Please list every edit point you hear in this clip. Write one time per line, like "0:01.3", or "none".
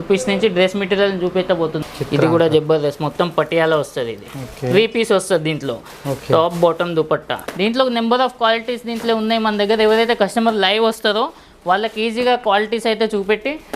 0:01.8
0:07.4